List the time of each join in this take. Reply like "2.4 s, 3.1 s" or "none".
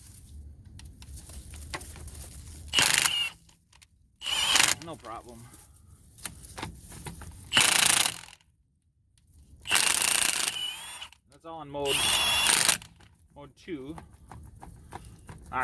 none

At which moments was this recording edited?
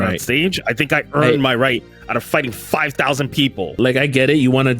3.8 s

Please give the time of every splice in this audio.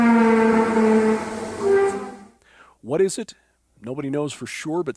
none

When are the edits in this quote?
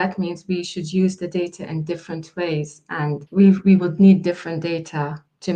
3.2 s

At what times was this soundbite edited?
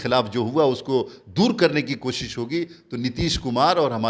none

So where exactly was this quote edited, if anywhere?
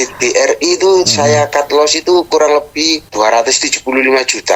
none

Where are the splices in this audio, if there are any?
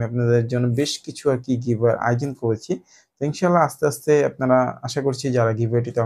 none

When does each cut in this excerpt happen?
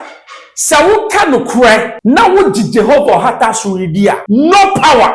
1.9 s, 4.2 s

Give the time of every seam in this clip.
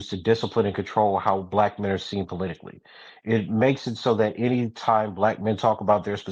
none

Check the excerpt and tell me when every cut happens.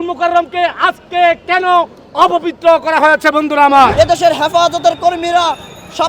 3.9 s

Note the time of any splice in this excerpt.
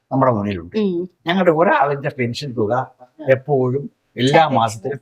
1.1 s

